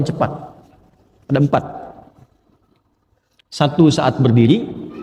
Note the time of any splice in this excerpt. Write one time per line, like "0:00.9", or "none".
none